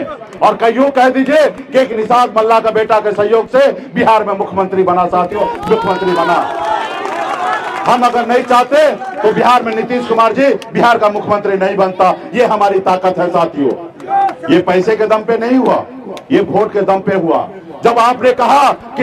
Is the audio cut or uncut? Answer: uncut